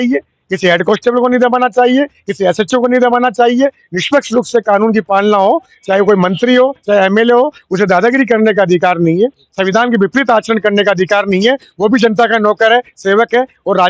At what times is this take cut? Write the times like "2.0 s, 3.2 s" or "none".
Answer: none